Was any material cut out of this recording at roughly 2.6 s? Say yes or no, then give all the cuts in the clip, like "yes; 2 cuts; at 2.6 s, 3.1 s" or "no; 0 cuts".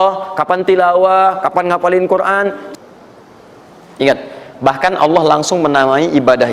yes; 1 cut; at 2.6 s